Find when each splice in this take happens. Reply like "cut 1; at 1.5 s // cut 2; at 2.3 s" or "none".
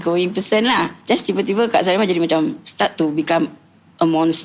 cut 1; at 1.0 s